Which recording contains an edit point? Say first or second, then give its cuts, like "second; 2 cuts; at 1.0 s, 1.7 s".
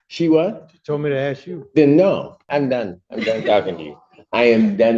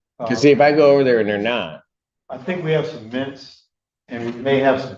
first; 1 cut; at 2.4 s